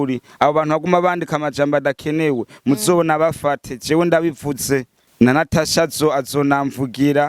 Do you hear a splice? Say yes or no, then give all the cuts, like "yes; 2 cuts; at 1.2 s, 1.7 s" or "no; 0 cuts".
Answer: yes; 1 cut; at 5.0 s